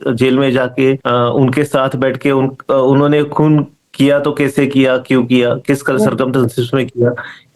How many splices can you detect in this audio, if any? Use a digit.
1